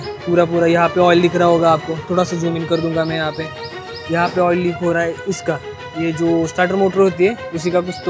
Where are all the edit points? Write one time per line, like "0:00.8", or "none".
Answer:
none